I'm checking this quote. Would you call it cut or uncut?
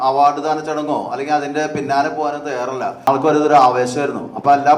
cut